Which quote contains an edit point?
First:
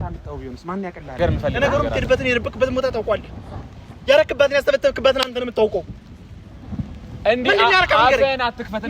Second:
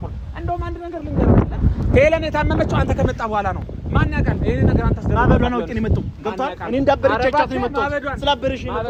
first; 1 cut; at 1.2 s

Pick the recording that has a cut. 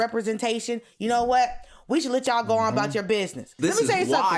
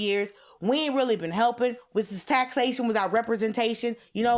first; 1 cut; at 3.4 s

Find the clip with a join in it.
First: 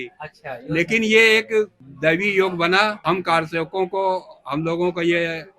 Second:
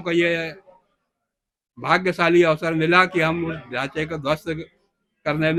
first; 2 cuts; at 1.8 s, 3.0 s

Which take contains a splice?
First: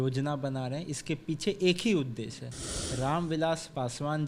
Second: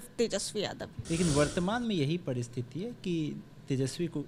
second; 1 cut; at 0.9 s

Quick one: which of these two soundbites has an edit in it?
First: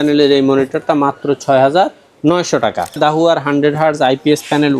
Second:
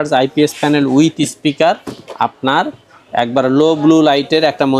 first; 1 cut; at 3.0 s

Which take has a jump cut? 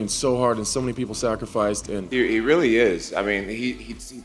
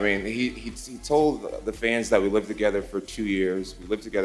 first; 1 cut; at 2.1 s

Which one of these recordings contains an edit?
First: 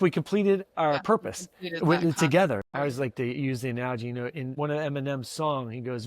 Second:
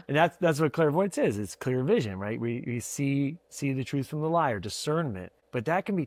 first; 1 cut; at 2.6 s

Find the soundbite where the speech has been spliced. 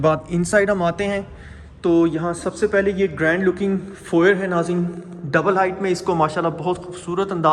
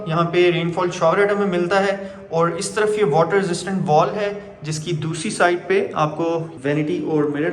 second; 1 cut; at 6.5 s

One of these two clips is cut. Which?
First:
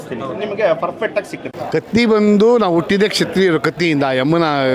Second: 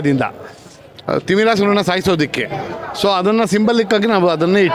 first; 1 cut; at 1.5 s

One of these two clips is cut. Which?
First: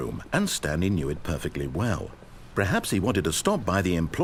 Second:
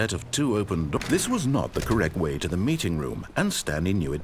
second; 1 cut; at 1.0 s

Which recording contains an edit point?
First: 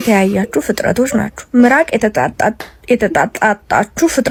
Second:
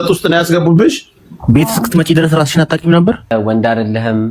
second; 1 cut; at 3.3 s

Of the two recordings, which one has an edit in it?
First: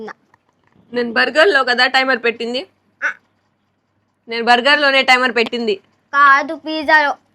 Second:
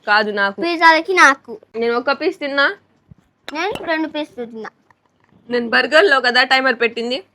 second; 1 cut; at 1.6 s

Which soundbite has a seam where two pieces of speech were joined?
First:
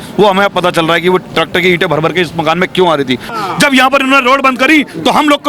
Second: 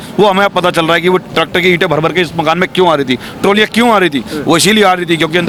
first; 1 cut; at 3.4 s

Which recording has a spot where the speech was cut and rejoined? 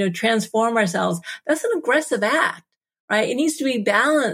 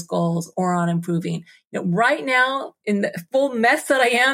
second; 1 cut; at 2.8 s

